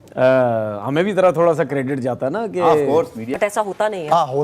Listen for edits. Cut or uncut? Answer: cut